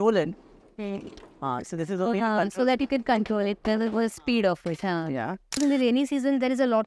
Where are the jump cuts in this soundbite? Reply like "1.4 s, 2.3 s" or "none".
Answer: 5.6 s